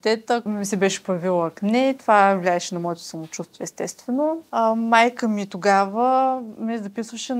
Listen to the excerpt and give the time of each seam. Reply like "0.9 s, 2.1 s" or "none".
none